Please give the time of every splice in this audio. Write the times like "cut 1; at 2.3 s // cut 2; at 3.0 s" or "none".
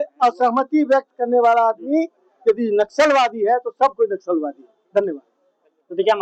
none